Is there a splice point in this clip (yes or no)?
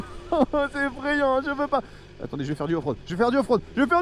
no